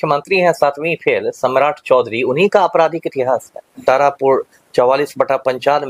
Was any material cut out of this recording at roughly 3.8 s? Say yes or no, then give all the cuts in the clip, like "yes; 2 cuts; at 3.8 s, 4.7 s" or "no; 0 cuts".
yes; 1 cut; at 3.8 s